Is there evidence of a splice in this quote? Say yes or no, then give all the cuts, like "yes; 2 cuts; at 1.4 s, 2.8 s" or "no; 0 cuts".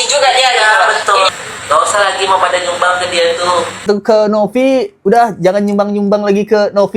yes; 2 cuts; at 1.3 s, 3.8 s